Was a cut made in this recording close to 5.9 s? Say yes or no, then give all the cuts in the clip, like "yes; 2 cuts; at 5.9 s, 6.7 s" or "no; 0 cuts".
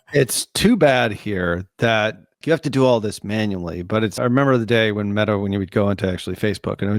no; 2 cuts; at 2.3 s, 4.1 s